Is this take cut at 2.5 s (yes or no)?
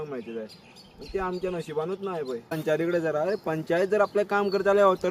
yes